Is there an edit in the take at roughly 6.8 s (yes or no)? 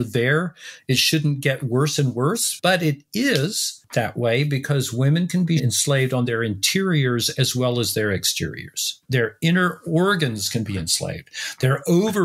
no